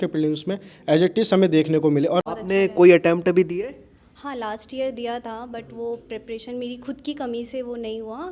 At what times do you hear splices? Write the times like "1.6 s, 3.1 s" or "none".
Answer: 2.2 s